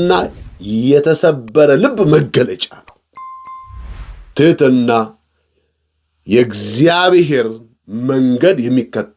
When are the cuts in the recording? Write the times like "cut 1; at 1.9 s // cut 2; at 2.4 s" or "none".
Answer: none